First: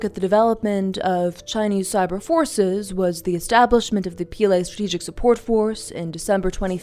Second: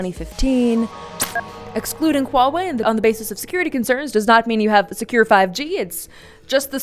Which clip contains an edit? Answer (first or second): second